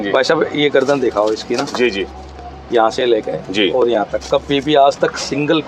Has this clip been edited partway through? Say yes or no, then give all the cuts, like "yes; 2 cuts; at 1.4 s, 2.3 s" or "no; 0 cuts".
no; 0 cuts